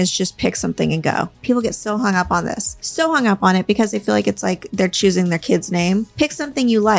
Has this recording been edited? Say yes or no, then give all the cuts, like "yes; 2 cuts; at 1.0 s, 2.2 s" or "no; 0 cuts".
yes; 3 cuts; at 1.4 s, 2.8 s, 6.1 s